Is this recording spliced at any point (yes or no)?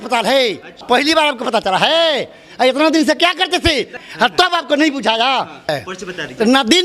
yes